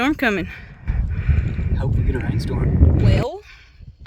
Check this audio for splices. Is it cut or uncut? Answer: cut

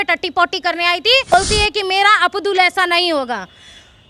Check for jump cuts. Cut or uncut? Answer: cut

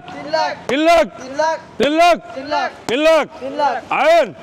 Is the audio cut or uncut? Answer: uncut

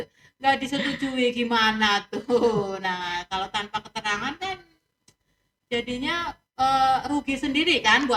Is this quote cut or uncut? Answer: uncut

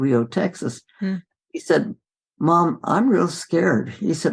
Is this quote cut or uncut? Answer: uncut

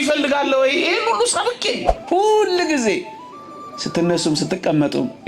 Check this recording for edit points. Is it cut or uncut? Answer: cut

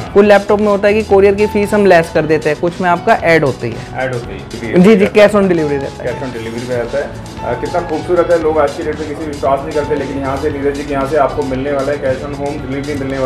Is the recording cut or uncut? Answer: uncut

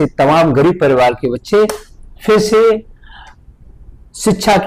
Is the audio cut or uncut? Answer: uncut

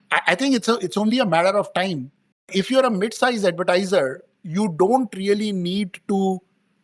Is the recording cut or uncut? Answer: cut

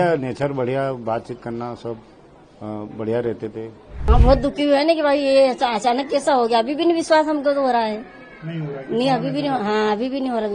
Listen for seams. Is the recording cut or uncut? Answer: cut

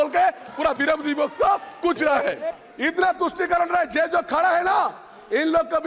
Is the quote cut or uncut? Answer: cut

